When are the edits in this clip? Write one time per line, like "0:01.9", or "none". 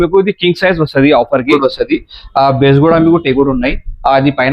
0:01.5